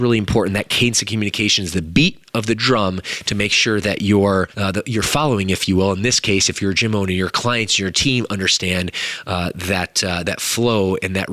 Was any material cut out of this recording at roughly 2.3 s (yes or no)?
no